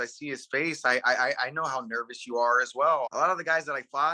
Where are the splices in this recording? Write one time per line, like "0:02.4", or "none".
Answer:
0:03.1